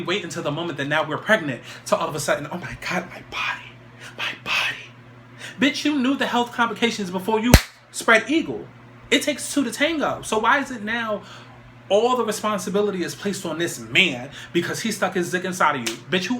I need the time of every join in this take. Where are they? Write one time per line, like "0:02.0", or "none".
none